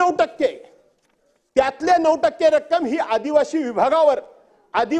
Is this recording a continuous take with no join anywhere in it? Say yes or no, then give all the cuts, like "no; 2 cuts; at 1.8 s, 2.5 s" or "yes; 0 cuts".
yes; 0 cuts